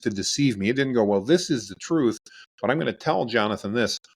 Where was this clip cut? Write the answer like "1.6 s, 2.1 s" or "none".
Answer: none